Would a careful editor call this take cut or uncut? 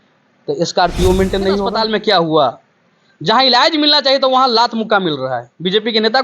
cut